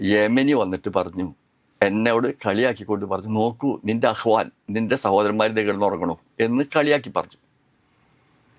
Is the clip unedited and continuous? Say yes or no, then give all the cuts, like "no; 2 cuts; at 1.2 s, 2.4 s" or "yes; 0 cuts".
yes; 0 cuts